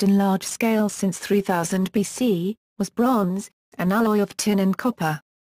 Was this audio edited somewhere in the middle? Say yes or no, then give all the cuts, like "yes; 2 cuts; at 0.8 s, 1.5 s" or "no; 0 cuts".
yes; 1 cut; at 3.1 s